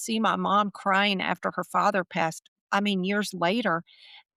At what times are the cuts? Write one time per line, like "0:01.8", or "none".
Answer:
none